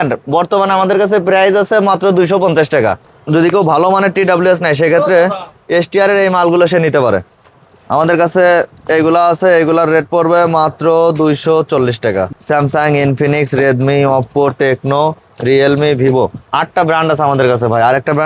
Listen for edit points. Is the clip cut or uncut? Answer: cut